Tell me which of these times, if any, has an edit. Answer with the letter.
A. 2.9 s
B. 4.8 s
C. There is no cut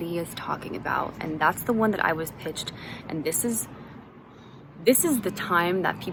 C